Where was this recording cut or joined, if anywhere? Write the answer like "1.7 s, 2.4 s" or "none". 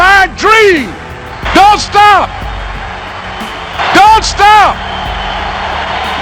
3.8 s